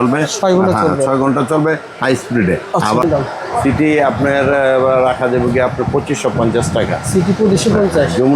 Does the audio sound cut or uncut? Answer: cut